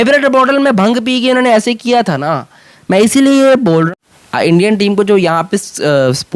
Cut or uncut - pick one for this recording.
cut